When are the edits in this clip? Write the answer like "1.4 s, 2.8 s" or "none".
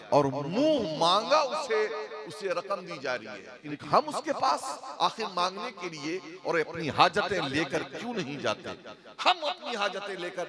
3.7 s